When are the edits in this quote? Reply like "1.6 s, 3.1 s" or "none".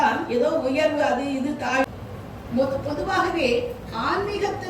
1.9 s

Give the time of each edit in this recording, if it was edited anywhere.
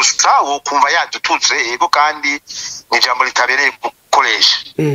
none

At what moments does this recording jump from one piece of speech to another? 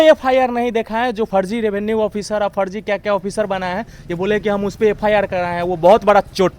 1.3 s

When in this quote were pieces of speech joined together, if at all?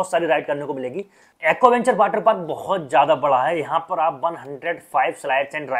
none

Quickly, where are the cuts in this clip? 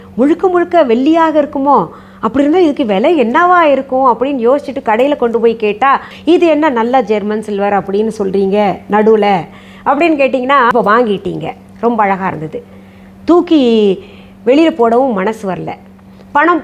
6.1 s, 10.7 s

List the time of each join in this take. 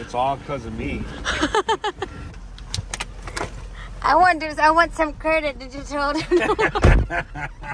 2.2 s

